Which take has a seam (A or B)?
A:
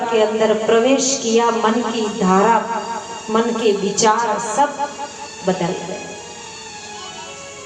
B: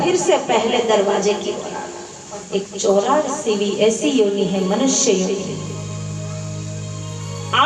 B